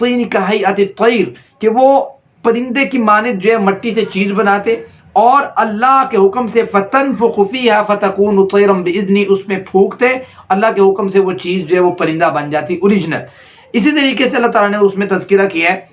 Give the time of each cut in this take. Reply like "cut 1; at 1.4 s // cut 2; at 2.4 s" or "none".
none